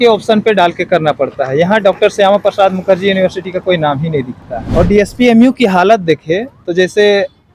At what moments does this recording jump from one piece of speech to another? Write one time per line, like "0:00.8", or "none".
0:04.5